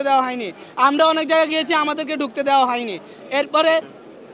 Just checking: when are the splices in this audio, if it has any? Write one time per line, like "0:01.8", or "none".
none